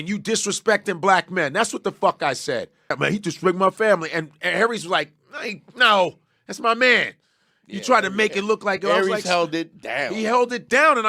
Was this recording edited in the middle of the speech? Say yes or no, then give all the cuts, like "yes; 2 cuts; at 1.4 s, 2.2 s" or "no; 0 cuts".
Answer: yes; 1 cut; at 3.0 s